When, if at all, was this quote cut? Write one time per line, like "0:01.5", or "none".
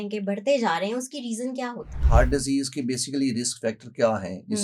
0:02.0